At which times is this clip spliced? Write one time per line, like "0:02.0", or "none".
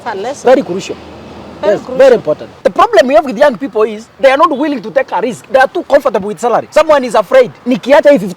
0:02.5
0:06.7
0:07.6